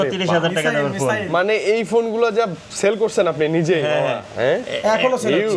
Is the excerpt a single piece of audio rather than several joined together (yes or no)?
yes